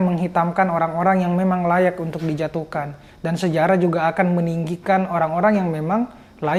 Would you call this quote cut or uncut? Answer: uncut